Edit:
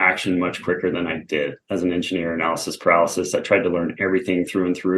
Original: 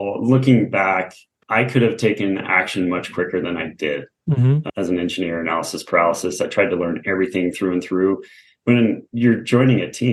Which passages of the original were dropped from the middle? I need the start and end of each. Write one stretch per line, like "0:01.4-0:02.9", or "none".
0:04.1-0:04.7